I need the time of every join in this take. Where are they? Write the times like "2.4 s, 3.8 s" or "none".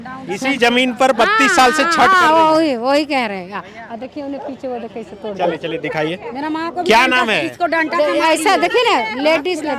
none